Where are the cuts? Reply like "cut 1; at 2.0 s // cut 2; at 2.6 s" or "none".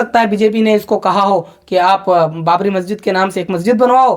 none